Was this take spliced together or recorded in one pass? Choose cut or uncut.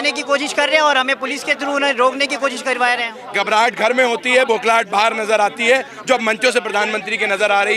cut